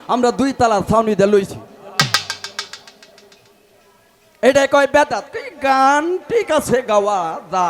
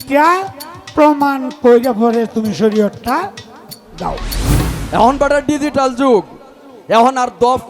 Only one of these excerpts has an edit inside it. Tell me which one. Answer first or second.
second